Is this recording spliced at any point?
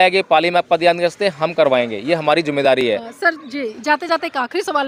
no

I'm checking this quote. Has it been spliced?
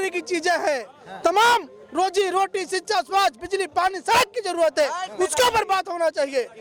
no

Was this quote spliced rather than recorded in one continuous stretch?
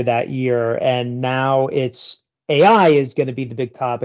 no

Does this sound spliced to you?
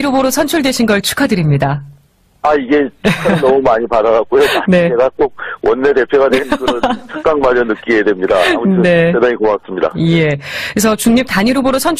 no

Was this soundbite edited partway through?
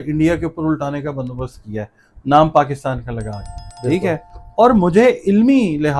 yes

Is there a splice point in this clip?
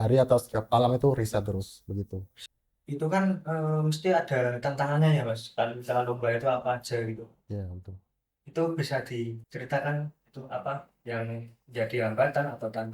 no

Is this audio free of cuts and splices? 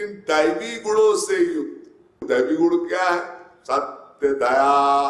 no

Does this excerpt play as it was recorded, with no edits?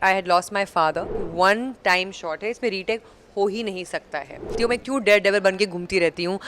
no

